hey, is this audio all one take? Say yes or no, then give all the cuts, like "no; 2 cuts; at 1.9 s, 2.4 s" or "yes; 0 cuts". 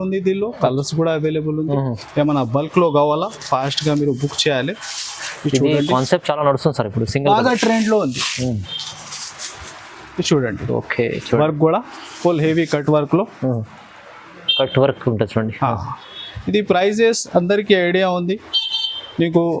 yes; 0 cuts